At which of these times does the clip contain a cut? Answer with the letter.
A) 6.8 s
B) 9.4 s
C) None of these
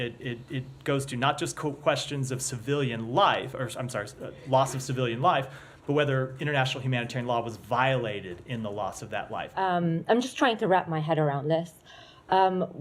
B